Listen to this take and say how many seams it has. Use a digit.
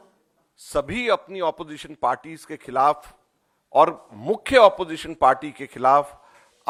0